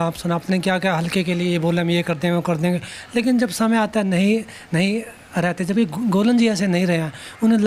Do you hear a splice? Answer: no; 0 cuts

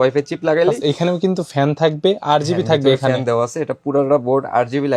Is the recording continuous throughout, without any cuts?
yes; 0 cuts

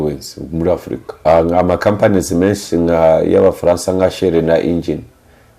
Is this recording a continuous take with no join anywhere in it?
no; 1 cut; at 1.2 s

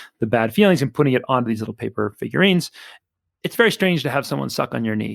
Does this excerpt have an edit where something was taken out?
yes; 1 cut; at 3.2 s

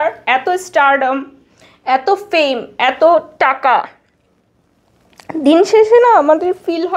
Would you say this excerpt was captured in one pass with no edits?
yes; 0 cuts

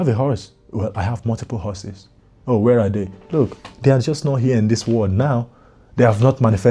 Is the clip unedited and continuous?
yes; 0 cuts

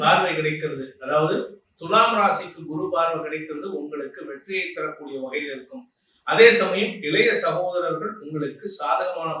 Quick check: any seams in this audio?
no; 0 cuts

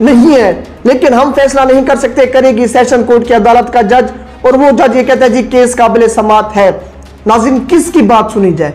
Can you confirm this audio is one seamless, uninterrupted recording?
yes; 0 cuts

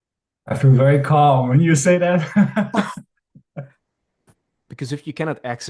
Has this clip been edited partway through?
yes; 1 cut; at 3.7 s

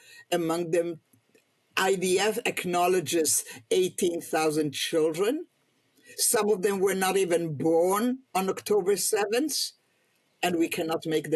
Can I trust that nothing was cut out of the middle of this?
yes; 0 cuts

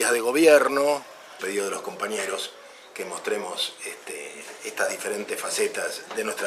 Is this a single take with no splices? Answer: yes; 0 cuts

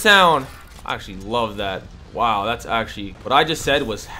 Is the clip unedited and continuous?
no; 1 cut; at 3.1 s

